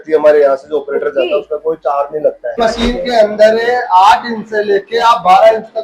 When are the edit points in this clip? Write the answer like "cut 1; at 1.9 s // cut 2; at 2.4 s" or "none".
cut 1; at 2.6 s